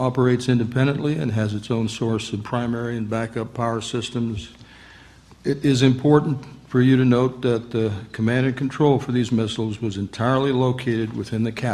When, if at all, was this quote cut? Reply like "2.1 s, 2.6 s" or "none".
3.9 s